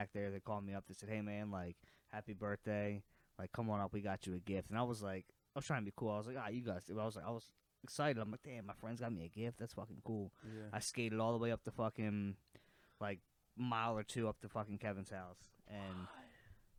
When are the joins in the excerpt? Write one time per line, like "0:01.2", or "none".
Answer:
none